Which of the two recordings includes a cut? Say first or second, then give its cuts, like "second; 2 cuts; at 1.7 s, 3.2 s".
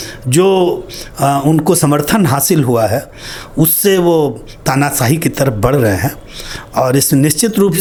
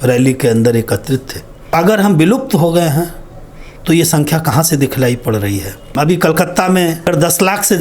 second; 3 cuts; at 1.8 s, 5.9 s, 7.1 s